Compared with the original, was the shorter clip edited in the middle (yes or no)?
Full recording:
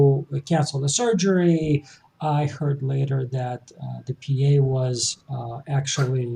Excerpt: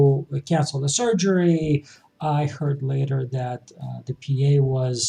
no